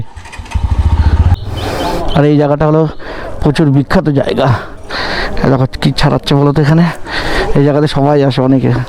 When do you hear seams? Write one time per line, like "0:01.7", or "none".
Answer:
0:01.3